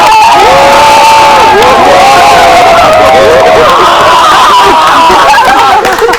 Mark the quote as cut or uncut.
uncut